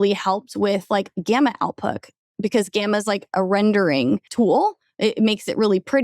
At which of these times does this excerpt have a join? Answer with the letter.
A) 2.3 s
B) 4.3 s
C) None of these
B